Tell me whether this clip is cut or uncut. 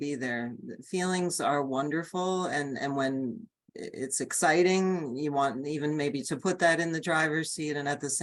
uncut